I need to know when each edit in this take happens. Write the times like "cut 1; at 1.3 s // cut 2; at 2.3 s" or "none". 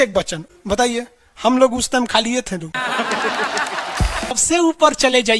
cut 1; at 4.4 s